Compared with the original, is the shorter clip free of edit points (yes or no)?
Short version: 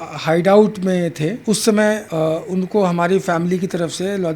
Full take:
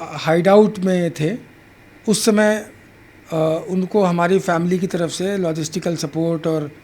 no